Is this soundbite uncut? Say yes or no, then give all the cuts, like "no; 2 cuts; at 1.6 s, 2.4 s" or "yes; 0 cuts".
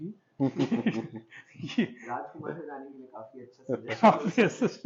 yes; 0 cuts